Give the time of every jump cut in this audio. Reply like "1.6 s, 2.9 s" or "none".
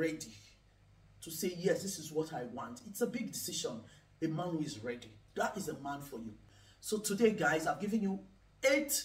none

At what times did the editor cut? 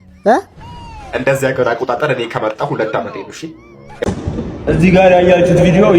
4.0 s

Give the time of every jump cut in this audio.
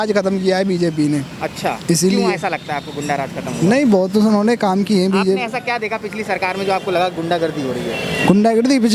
none

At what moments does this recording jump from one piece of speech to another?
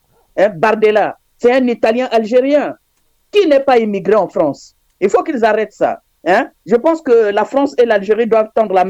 none

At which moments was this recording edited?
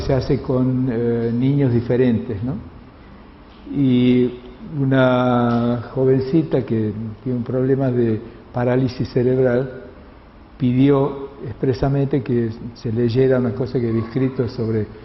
12.2 s

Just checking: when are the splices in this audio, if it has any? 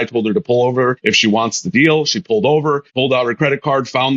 1.0 s, 2.9 s

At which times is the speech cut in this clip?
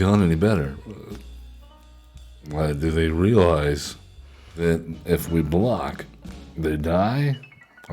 2.5 s, 4.6 s

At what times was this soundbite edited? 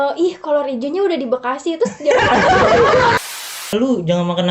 3.2 s

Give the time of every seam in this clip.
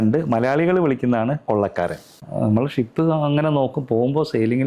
2.2 s

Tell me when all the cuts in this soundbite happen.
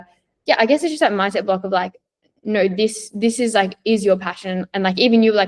none

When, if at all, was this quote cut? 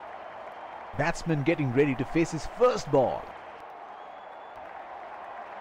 none

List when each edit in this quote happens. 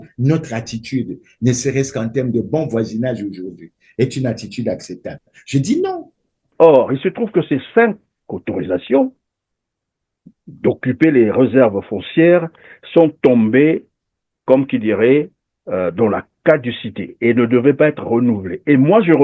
6.4 s

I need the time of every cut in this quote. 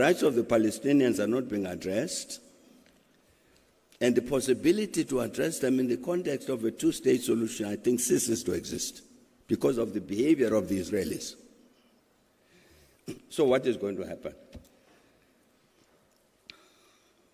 none

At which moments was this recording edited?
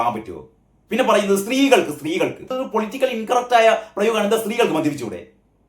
2.5 s

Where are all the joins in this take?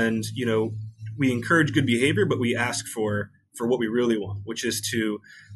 none

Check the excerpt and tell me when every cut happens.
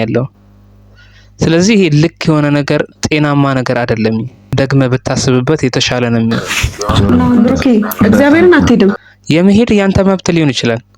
7.5 s

